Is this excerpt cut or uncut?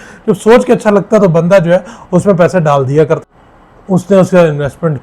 cut